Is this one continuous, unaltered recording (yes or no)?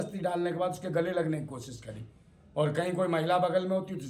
yes